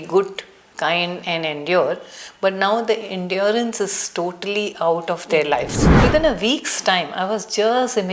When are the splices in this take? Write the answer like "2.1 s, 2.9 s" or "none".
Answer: 5.8 s